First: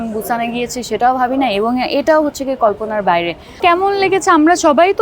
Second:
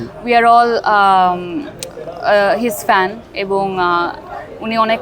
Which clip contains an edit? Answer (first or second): first